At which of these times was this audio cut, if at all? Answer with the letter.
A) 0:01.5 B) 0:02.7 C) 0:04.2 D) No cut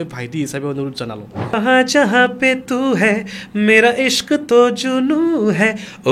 A